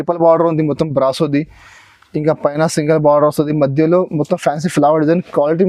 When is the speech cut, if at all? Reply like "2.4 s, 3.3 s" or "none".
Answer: none